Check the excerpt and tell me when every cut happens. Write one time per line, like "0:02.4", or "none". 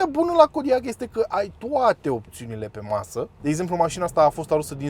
0:03.3